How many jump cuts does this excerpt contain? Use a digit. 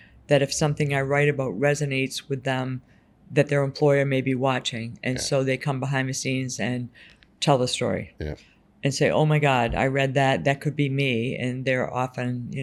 0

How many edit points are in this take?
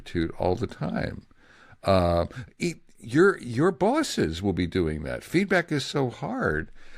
0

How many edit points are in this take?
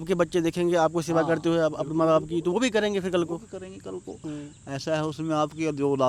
0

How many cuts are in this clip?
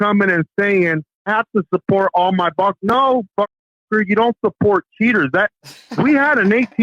1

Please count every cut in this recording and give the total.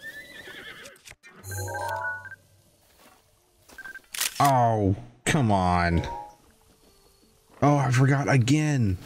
1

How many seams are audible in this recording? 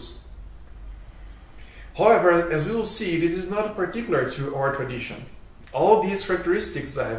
1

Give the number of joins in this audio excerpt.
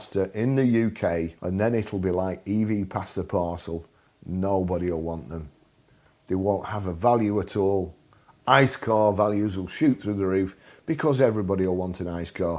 1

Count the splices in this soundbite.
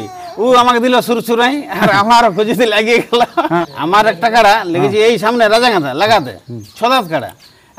1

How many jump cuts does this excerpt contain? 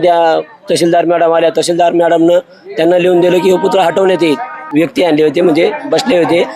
1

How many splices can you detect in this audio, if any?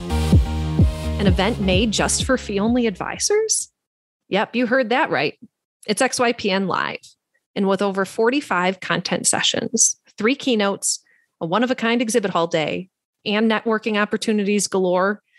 1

